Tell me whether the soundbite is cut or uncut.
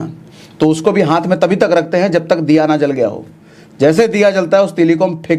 uncut